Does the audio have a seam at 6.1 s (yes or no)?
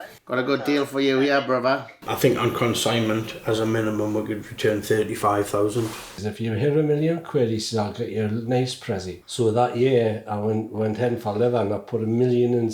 yes